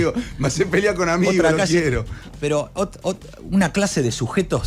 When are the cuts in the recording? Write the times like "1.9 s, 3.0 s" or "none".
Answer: none